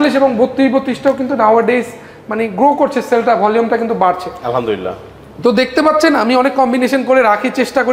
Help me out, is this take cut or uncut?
uncut